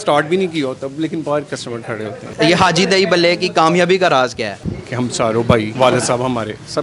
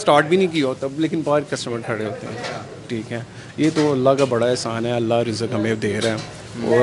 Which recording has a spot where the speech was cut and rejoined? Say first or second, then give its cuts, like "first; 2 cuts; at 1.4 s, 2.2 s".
first; 3 cuts; at 2.2 s, 4.6 s, 5.7 s